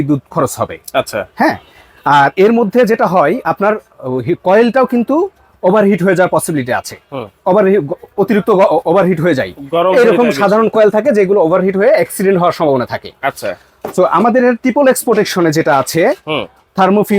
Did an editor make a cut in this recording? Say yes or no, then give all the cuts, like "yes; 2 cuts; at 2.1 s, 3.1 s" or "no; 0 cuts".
no; 0 cuts